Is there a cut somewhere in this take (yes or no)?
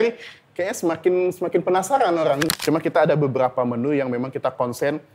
yes